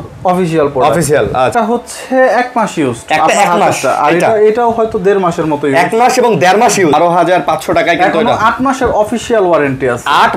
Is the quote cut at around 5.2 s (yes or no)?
no